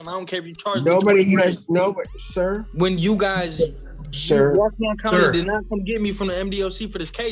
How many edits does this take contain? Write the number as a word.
one